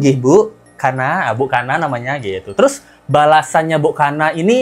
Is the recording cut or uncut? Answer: uncut